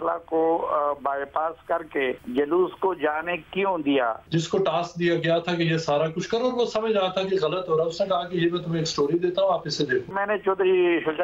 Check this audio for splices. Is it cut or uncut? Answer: cut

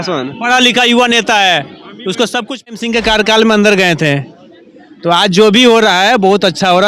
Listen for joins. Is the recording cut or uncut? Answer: cut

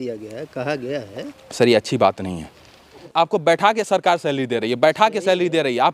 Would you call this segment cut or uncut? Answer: cut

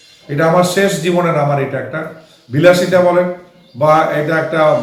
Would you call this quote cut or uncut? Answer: uncut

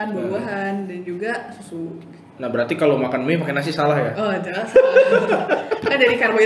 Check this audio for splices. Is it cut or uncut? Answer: uncut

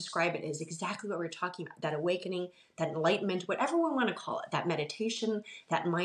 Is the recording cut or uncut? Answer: uncut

